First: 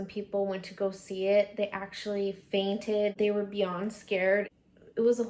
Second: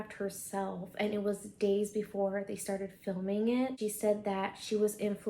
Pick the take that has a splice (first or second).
second